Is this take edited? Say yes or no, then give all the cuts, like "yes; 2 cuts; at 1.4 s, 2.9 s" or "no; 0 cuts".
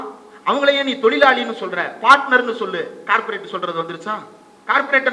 no; 0 cuts